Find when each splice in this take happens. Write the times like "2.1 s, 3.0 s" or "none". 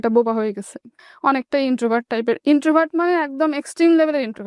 none